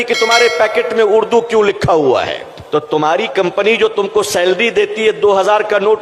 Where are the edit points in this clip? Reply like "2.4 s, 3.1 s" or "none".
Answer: 2.5 s